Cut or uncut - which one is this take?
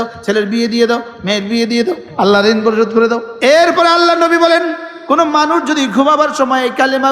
cut